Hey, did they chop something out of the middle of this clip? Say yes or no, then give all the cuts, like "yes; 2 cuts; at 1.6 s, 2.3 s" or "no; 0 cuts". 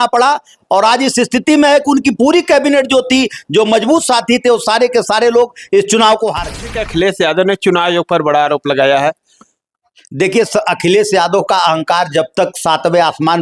yes; 1 cut; at 6.8 s